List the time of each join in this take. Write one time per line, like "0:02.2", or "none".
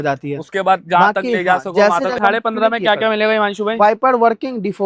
0:02.2